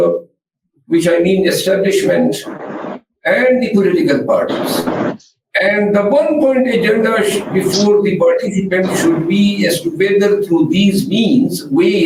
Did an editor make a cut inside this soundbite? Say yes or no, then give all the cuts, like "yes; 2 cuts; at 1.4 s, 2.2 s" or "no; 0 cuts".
no; 0 cuts